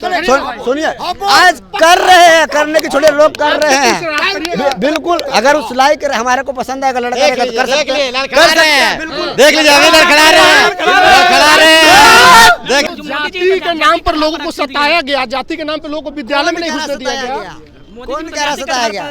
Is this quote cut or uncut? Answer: cut